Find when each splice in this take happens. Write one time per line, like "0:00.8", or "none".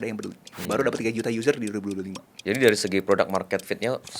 0:02.4